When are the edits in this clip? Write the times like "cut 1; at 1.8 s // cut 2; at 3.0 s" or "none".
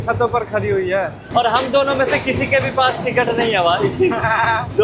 cut 1; at 1.2 s